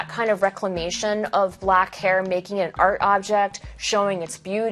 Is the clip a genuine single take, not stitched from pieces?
yes; 0 cuts

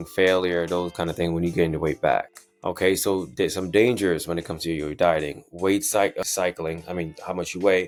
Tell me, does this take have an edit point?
no; 0 cuts

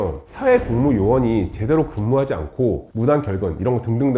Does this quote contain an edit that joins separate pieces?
no; 0 cuts

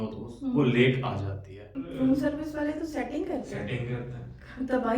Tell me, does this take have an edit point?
yes; 1 cut; at 1.9 s

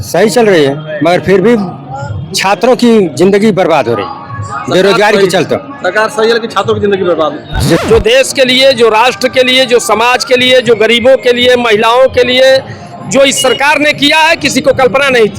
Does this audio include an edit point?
yes; 1 cut; at 7.8 s

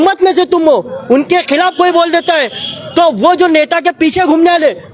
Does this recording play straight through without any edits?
yes; 0 cuts

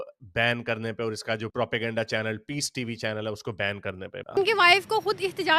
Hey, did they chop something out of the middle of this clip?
yes; 1 cut; at 4.4 s

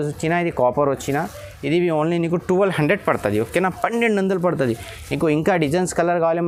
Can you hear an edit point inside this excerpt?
no; 0 cuts

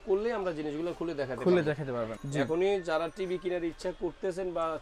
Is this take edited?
yes; 1 cut; at 2.1 s

